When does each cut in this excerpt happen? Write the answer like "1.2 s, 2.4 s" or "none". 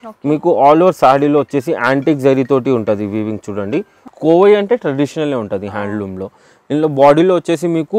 4.1 s